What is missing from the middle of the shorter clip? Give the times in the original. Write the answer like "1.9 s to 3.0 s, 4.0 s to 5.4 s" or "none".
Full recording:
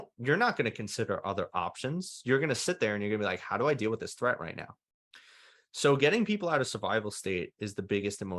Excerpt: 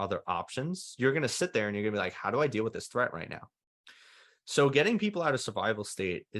none